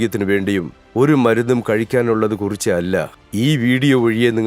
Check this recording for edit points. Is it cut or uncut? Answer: cut